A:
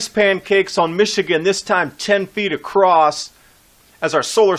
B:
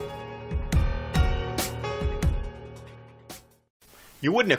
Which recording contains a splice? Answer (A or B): B